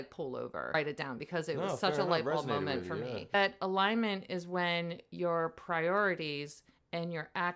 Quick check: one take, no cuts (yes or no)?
no